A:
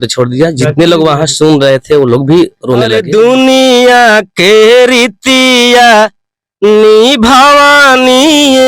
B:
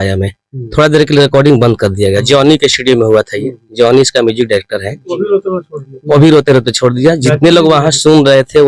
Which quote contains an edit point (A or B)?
A